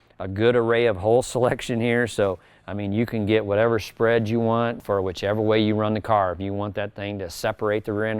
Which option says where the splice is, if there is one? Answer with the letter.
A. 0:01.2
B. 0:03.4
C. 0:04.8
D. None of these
C